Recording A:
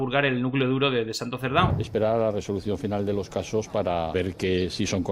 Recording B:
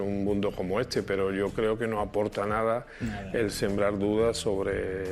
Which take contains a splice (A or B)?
A